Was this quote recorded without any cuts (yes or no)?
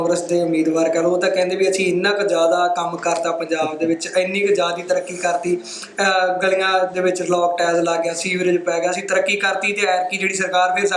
yes